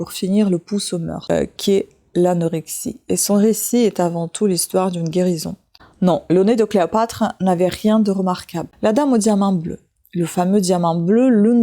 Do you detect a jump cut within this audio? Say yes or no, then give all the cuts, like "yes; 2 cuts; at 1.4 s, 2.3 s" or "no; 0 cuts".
yes; 3 cuts; at 1.3 s, 5.8 s, 8.6 s